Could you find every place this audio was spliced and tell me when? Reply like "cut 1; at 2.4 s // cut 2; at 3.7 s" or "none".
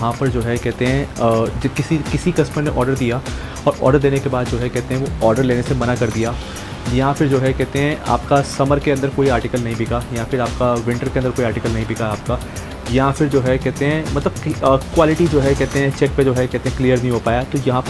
none